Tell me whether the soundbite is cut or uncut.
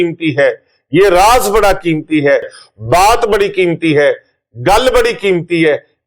cut